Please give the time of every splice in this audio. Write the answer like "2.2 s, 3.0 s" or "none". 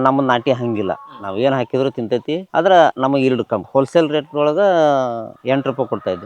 3.6 s

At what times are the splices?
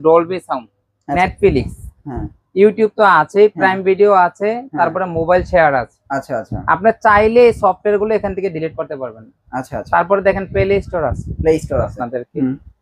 1.2 s, 12.0 s

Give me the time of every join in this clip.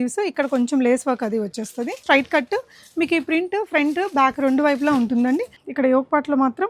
2.0 s, 5.6 s

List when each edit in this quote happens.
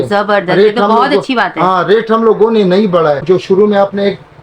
3.2 s

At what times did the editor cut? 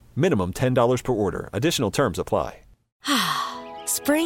2.9 s

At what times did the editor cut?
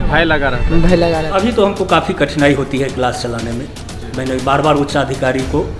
1.2 s

